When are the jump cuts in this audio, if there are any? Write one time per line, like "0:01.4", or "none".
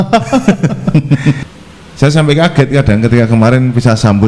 0:01.4